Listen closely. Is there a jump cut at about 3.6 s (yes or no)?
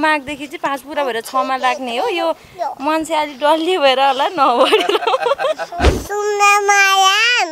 no